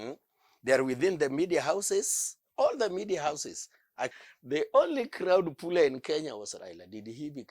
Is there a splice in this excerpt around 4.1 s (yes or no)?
yes